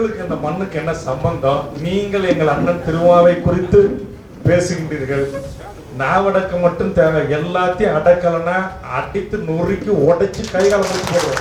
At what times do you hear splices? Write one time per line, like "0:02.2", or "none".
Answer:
none